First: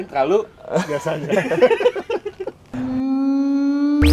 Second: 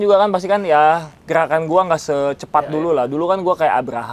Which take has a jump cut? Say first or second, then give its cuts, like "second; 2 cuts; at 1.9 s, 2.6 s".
first; 1 cut; at 2.7 s